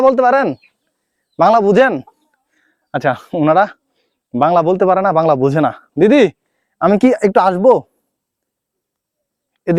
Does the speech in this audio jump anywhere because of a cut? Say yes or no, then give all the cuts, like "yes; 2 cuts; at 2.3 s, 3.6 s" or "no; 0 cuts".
no; 0 cuts